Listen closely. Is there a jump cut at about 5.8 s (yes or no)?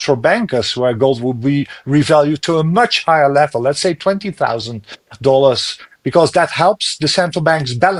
no